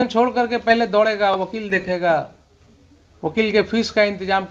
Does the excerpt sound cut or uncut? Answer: uncut